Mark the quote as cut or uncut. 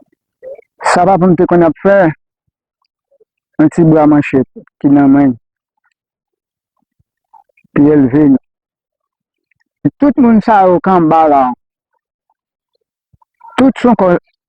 cut